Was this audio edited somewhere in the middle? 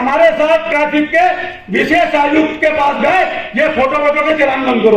no; 0 cuts

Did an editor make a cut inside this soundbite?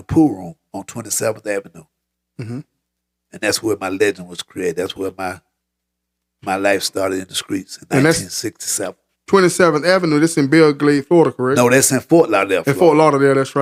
no; 0 cuts

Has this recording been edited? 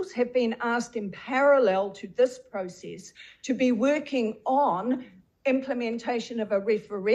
no; 0 cuts

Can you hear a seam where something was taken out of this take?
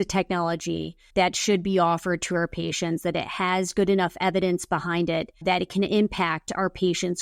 yes; 2 cuts; at 1.0 s, 5.3 s

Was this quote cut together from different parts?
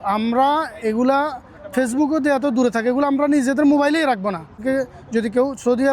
yes; 1 cut; at 4.6 s

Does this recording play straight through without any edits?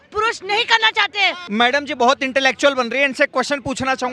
no; 1 cut; at 1.4 s

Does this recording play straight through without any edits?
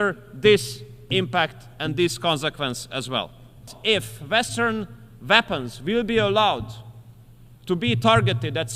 no; 1 cut; at 3.7 s

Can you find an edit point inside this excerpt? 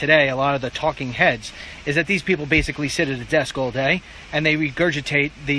yes; 1 cut; at 4.0 s

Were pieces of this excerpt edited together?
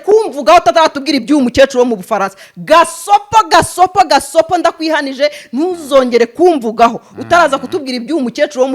no; 0 cuts

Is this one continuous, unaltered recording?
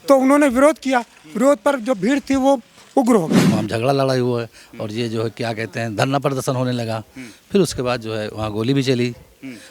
no; 1 cut; at 3.4 s

